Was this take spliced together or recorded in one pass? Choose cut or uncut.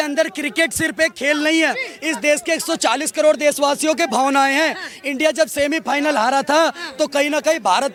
uncut